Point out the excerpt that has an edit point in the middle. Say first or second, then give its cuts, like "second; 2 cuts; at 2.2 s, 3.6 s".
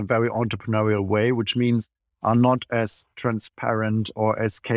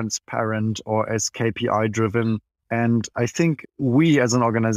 second; 2 cuts; at 2.5 s, 3.7 s